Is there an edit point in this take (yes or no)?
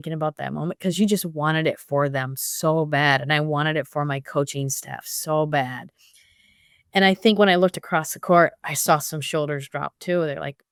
no